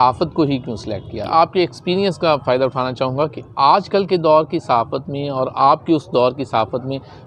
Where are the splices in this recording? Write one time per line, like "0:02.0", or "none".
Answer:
0:01.2